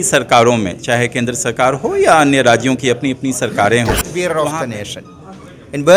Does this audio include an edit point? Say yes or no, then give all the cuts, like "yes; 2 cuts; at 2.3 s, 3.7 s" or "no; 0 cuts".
yes; 1 cut; at 4.3 s